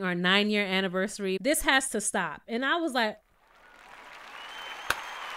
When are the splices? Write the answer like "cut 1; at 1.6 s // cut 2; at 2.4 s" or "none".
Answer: cut 1; at 1.4 s